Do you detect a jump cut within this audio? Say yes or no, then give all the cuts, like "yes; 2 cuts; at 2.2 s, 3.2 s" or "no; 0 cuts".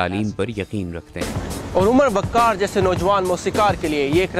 yes; 1 cut; at 1.5 s